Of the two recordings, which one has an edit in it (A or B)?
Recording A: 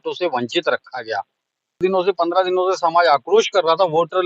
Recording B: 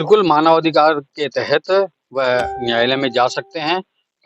A